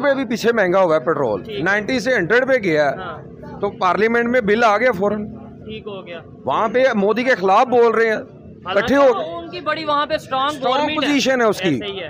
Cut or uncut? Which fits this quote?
uncut